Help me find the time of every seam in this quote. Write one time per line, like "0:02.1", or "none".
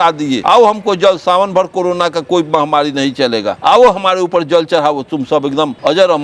none